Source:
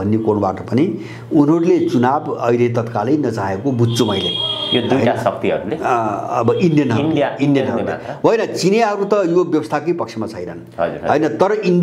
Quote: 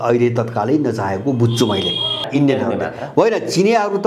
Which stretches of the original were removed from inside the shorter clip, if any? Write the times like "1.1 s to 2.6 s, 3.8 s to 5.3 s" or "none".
4.6 s to 7.3 s